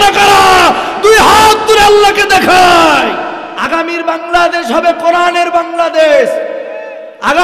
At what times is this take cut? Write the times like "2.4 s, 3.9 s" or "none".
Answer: 3.4 s